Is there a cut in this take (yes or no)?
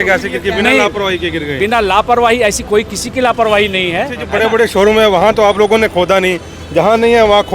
yes